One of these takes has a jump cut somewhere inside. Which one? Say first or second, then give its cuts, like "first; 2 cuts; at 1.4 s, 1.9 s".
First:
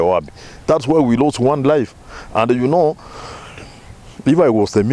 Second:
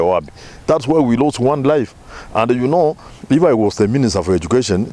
second; 1 cut; at 3.1 s